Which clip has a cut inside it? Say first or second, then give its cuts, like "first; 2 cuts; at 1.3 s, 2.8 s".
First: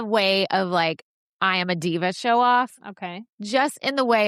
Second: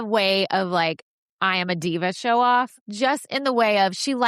second; 1 cut; at 2.8 s